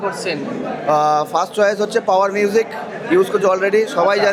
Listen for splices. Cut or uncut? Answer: uncut